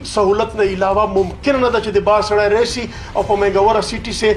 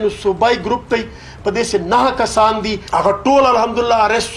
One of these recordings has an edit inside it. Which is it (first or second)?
second